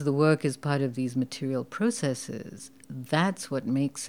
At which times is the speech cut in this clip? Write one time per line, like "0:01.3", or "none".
none